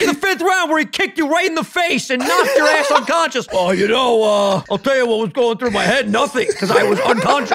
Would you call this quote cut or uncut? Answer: cut